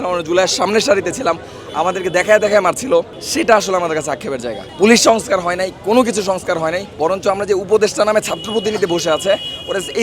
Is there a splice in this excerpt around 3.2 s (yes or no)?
yes